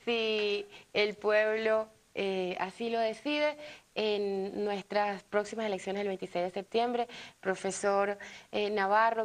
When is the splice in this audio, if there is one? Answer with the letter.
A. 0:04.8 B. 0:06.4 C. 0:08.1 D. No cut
A